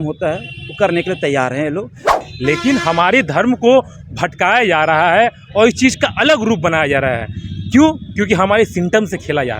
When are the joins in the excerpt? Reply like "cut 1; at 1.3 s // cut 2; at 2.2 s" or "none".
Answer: cut 1; at 2.1 s